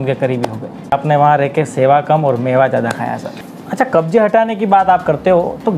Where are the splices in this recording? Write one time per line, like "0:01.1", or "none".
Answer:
0:00.9
0:03.6